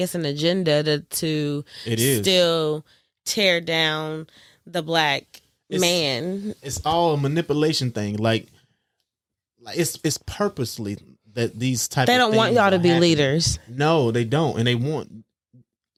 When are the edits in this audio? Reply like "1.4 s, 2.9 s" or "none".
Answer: none